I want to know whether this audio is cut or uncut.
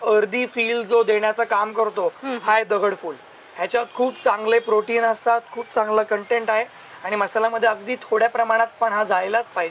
uncut